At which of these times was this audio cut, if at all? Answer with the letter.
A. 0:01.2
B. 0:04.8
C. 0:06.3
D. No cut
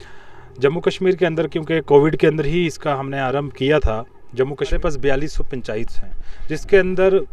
B